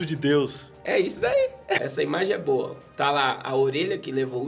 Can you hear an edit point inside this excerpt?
yes; 1 cut; at 1.8 s

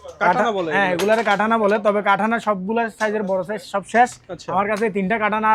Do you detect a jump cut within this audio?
no; 0 cuts

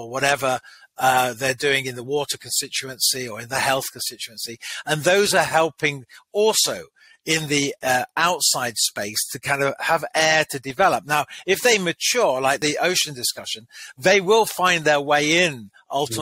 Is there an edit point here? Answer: yes; 1 cut; at 12.6 s

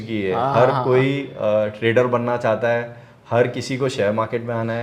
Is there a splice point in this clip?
no; 0 cuts

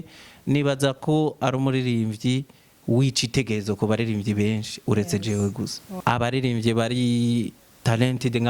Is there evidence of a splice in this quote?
yes; 1 cut; at 5.9 s

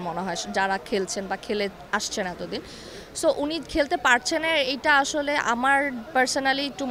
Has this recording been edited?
no; 0 cuts

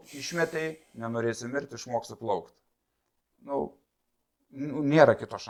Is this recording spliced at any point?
no; 0 cuts

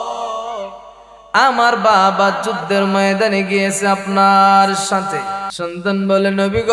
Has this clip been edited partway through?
yes; 1 cut; at 5.5 s

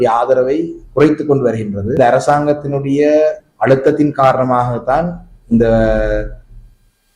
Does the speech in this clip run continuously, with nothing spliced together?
no; 1 cut; at 2.0 s

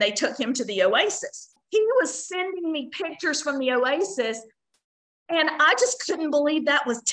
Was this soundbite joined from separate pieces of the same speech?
yes; 1 cut; at 1.5 s

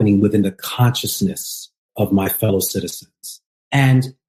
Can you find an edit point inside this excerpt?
yes; 1 cut; at 1.9 s

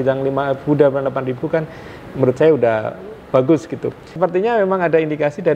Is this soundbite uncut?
no; 1 cut; at 4.1 s

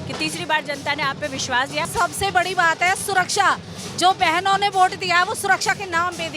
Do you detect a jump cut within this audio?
yes; 1 cut; at 1.9 s

